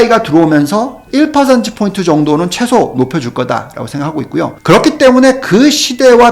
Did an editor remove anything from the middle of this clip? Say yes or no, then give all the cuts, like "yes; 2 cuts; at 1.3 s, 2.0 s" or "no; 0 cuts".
yes; 2 cuts; at 1.0 s, 4.6 s